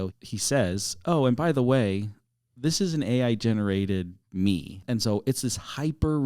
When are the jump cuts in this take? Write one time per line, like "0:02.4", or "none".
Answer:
0:04.8